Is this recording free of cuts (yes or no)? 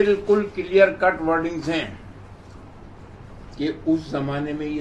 yes